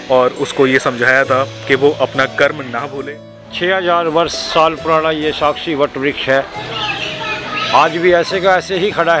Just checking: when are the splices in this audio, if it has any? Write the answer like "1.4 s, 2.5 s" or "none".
2.9 s